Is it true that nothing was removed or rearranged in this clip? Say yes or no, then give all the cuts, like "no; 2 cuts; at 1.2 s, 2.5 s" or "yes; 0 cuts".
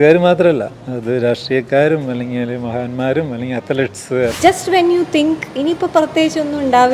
no; 1 cut; at 4.3 s